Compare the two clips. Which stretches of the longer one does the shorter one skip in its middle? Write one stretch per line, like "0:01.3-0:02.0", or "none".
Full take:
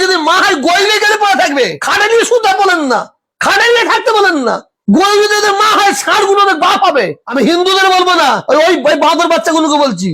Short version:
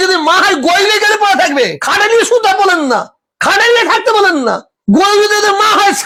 none